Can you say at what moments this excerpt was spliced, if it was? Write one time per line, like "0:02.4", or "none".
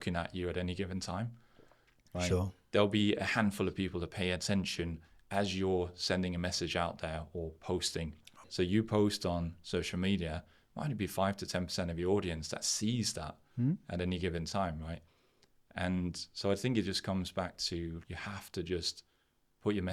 0:08.5
0:18.0